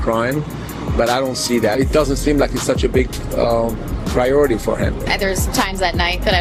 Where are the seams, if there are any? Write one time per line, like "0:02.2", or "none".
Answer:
none

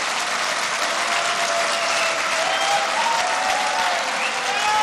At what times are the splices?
none

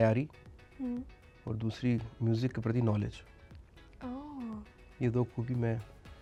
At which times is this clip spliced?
none

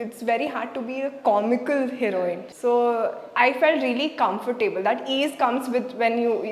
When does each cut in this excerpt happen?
0:02.5

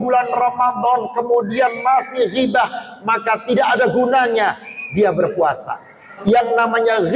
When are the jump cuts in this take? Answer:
0:06.1

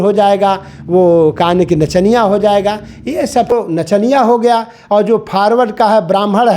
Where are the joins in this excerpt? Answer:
0:03.5

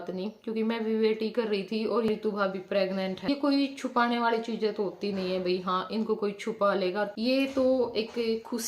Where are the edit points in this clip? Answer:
0:02.1
0:03.3
0:07.1

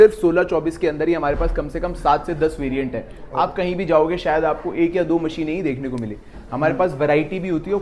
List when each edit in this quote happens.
none

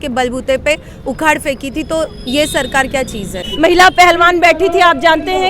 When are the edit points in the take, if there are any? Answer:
0:03.4

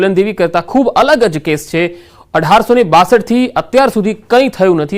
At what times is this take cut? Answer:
0:02.4

